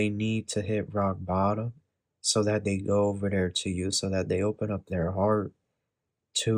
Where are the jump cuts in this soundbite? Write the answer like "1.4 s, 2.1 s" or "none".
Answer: none